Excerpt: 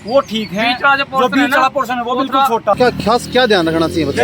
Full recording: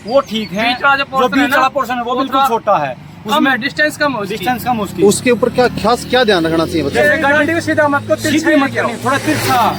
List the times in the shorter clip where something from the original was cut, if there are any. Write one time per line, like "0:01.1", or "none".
0:02.8